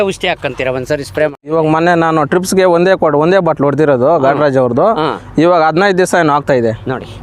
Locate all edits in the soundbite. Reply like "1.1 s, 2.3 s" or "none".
1.5 s

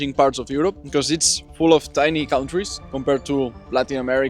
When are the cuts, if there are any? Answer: 0.8 s, 2.8 s

